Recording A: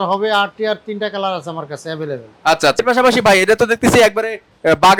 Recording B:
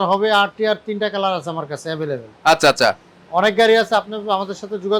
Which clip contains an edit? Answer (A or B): A